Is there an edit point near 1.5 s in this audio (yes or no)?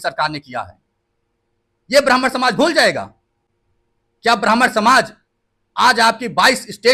no